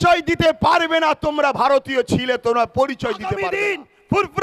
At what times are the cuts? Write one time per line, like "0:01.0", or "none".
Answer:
0:03.4